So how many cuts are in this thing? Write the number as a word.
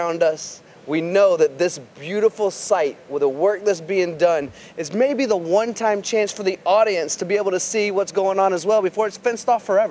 zero